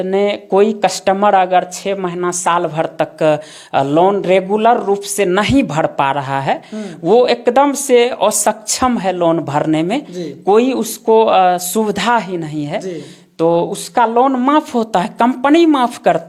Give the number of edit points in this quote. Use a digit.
0